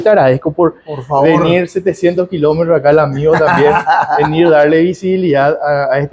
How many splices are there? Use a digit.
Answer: 0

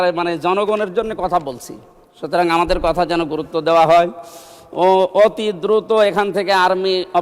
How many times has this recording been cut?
0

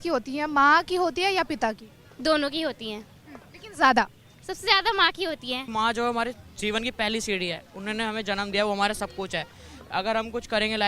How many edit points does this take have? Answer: 1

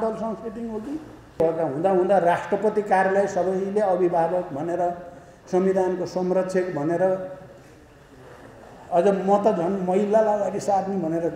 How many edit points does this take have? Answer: 1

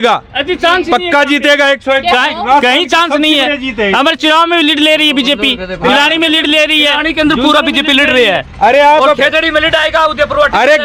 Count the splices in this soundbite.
0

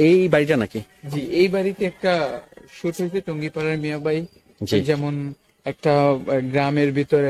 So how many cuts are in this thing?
0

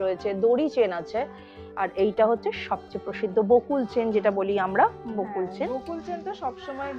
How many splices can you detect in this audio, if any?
0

